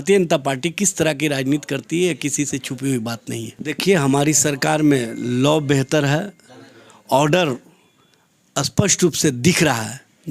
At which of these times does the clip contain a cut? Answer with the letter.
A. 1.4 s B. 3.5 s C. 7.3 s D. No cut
B